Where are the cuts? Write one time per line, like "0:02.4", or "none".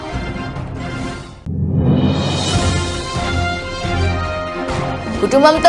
0:01.3